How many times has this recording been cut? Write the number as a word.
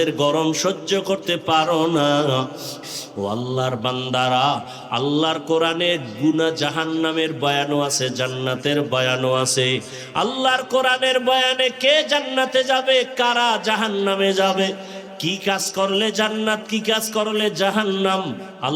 one